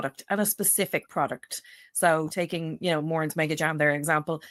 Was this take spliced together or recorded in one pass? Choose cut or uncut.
uncut